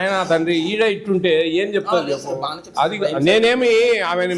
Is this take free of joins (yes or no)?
yes